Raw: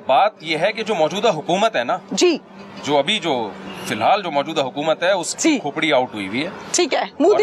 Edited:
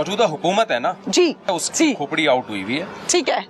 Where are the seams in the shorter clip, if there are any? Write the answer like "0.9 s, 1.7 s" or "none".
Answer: 1.5 s